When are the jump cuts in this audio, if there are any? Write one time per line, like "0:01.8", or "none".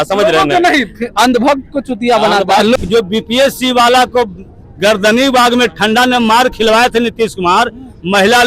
0:02.8